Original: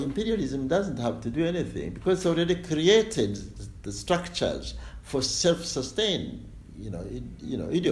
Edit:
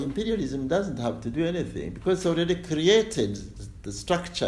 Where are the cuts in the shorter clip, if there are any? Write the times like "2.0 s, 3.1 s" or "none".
none